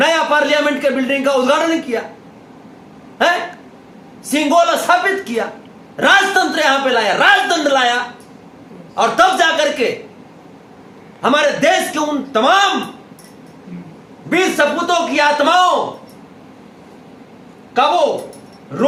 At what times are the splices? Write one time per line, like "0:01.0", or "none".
none